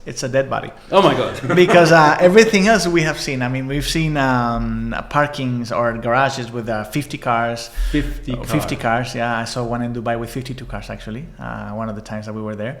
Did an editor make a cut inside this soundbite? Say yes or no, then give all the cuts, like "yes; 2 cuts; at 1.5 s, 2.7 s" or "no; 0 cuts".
no; 0 cuts